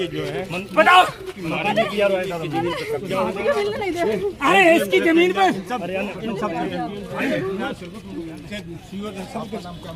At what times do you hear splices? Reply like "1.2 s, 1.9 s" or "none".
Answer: none

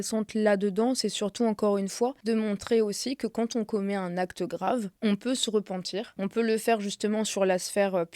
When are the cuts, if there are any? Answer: 2.2 s, 4.9 s, 6.1 s

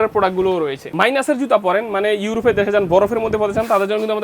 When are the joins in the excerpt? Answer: 0.9 s

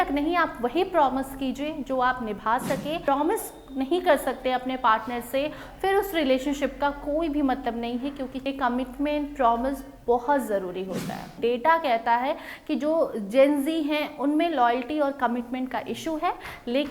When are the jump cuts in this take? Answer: 3.0 s, 8.5 s, 11.3 s

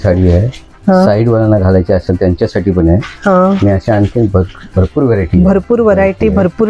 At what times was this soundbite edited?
none

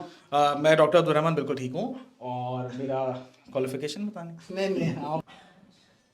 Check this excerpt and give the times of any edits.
5.2 s

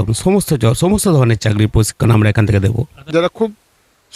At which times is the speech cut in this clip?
2.9 s

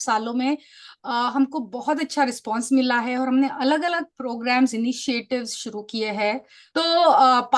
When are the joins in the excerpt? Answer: 6.6 s

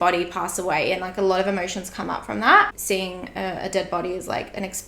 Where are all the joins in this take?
2.7 s

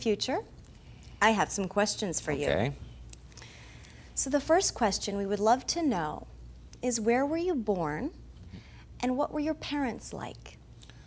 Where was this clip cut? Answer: 2.2 s

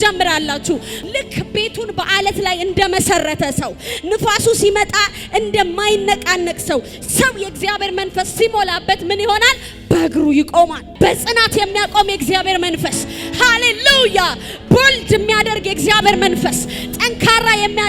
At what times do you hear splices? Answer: 1.0 s, 10.8 s

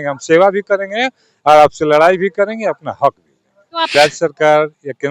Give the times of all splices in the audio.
3.9 s

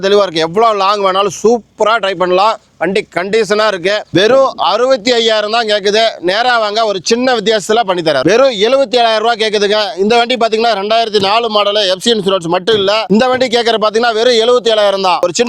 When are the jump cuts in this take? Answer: 8.2 s, 13.0 s

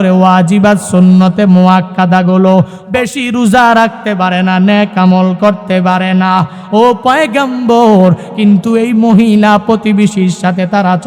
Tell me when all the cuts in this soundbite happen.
2.8 s

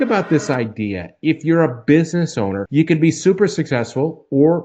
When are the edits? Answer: 2.6 s

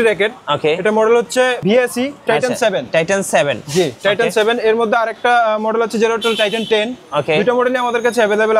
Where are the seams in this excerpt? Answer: 1.6 s

